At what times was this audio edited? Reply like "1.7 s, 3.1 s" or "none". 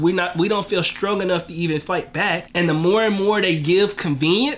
2.5 s